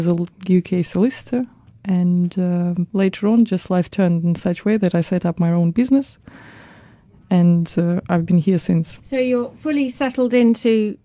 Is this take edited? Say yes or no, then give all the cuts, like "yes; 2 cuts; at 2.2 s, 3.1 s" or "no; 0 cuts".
yes; 1 cut; at 6.2 s